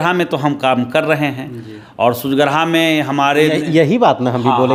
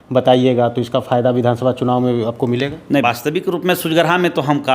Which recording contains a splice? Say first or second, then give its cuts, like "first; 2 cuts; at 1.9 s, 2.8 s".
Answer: second; 1 cut; at 3.0 s